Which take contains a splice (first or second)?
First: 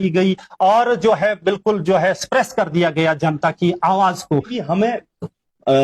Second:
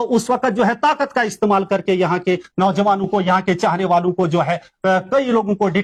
first